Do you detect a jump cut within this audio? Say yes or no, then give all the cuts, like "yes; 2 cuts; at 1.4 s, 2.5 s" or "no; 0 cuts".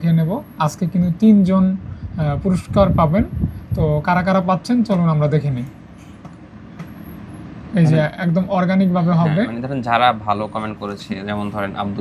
no; 0 cuts